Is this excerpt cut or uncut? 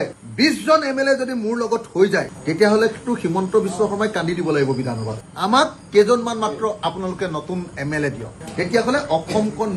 cut